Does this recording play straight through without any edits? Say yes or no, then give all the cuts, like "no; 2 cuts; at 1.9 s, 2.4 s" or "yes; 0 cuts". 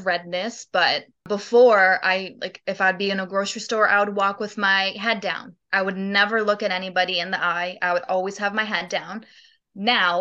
yes; 0 cuts